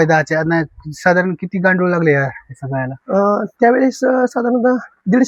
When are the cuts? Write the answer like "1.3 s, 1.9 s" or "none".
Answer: none